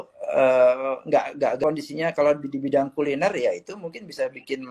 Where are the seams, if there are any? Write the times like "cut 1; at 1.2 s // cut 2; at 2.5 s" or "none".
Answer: cut 1; at 1.6 s